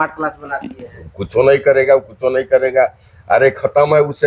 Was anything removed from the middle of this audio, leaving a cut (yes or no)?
no